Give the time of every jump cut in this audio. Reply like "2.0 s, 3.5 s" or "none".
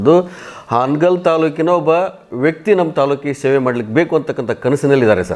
none